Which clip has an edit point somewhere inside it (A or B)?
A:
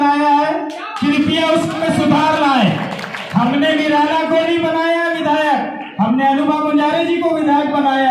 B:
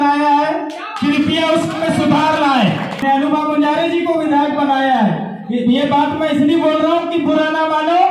B